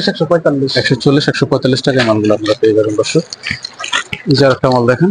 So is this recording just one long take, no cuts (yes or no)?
yes